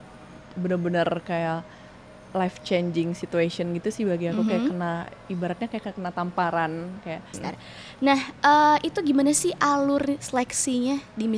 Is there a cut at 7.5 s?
yes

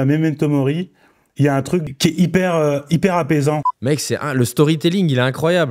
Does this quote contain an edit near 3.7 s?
yes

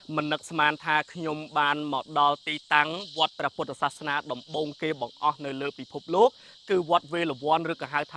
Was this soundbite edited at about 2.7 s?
no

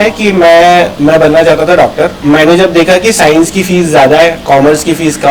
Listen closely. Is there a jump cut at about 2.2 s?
yes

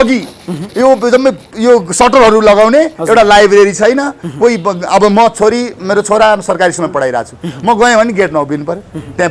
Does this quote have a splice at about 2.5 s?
no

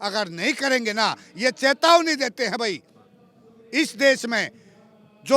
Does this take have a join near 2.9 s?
no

